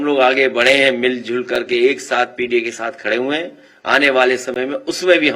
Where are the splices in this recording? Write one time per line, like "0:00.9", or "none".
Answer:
none

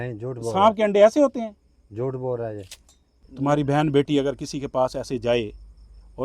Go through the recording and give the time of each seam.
0:03.2

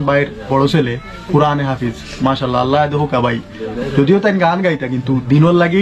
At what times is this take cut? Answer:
none

